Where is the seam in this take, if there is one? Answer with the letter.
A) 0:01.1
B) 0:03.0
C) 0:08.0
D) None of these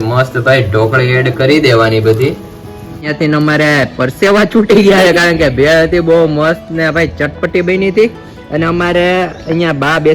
B